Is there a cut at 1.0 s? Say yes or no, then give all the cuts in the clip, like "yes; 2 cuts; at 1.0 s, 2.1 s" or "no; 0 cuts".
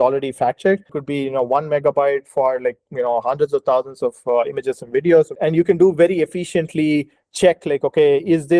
yes; 2 cuts; at 1.0 s, 5.3 s